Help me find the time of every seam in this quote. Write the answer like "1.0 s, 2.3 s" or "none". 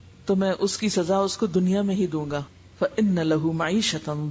2.6 s